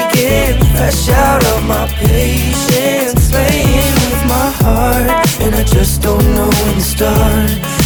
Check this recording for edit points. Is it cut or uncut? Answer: uncut